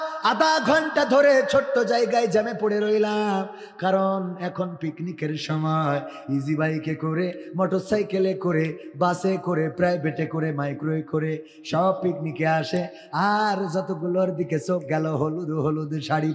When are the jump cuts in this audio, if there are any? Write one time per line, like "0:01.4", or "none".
none